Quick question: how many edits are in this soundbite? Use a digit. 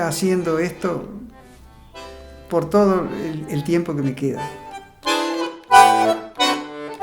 1